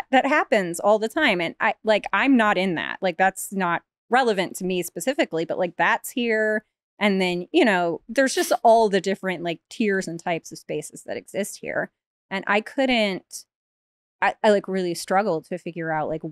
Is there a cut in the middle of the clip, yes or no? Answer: no